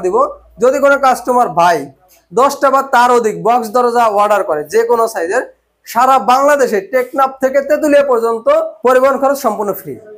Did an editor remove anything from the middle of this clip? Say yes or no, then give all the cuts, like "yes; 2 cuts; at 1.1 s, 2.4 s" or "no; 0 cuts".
yes; 1 cut; at 8.7 s